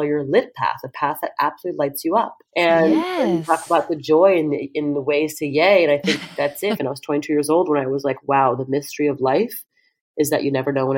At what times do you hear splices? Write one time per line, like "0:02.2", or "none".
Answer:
0:06.8